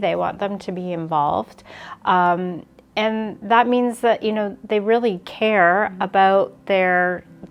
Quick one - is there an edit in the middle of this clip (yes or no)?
no